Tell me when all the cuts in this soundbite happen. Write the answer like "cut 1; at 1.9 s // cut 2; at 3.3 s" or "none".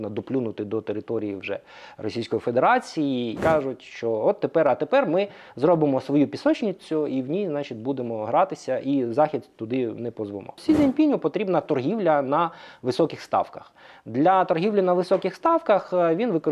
cut 1; at 3.4 s // cut 2; at 10.6 s